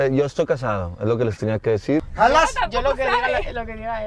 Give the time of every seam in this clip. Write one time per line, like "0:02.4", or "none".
0:02.1